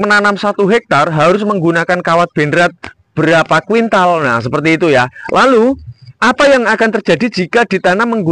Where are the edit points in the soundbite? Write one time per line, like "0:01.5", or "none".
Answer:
0:05.2